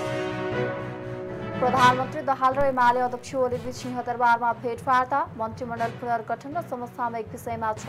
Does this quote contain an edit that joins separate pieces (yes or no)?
yes